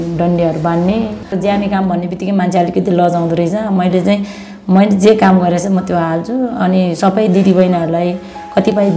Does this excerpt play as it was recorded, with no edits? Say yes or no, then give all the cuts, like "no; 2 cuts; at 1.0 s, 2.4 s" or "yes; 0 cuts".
no; 1 cut; at 1.3 s